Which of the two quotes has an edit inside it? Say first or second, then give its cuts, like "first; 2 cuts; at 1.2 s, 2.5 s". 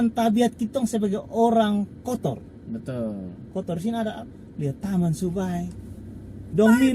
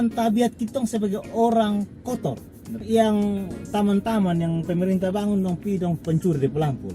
second; 1 cut; at 2.8 s